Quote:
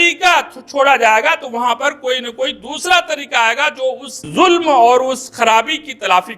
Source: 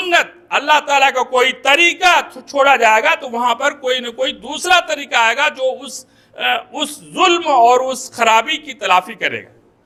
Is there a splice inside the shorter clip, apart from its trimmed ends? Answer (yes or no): yes